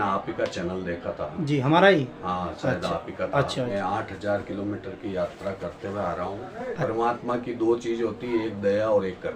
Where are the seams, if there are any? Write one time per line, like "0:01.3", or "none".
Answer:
0:03.7
0:06.8